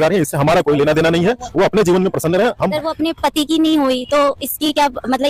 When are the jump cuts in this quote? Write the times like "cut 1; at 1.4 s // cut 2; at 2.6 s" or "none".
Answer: cut 1; at 2.7 s